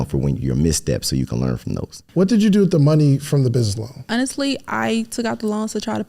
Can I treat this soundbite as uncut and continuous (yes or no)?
no